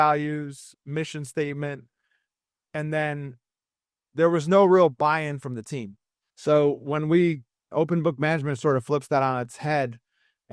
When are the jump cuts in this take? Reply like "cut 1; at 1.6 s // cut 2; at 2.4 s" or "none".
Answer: cut 1; at 6.0 s